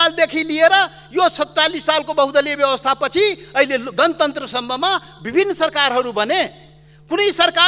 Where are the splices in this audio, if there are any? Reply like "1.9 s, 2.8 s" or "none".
none